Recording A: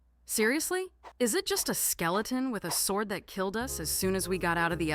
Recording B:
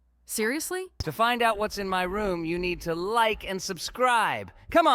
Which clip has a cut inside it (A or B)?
B